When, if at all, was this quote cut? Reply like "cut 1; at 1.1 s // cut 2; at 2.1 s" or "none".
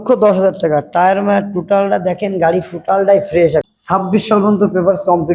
cut 1; at 3.7 s

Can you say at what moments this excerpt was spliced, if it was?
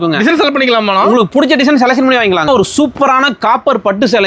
cut 1; at 2.5 s

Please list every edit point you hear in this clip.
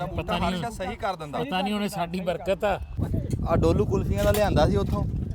cut 1; at 3.0 s

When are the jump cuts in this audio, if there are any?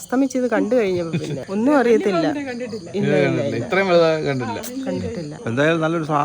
cut 1; at 1.4 s // cut 2; at 5.3 s

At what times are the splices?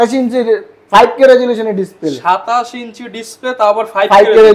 none

